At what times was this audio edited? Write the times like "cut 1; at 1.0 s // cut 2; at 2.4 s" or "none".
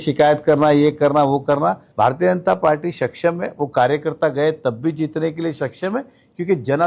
cut 1; at 1.8 s